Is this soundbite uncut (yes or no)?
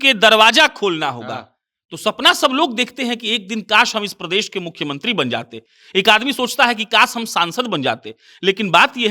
yes